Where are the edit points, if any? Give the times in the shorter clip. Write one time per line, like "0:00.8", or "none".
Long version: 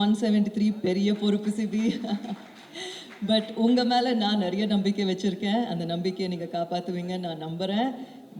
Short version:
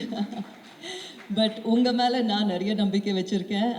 none